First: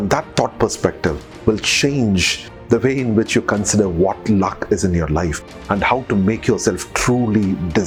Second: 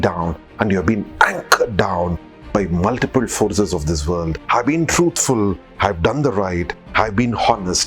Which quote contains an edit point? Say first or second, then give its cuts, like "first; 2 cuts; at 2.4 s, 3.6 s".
second; 1 cut; at 4.4 s